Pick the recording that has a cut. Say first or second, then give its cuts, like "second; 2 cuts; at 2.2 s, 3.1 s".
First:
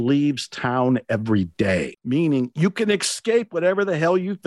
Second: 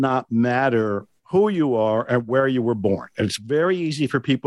first; 1 cut; at 2.0 s